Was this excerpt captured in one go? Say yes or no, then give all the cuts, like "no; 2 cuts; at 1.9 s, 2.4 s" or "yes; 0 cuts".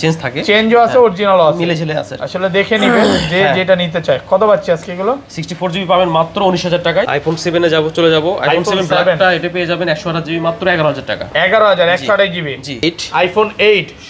no; 2 cuts; at 7.1 s, 12.8 s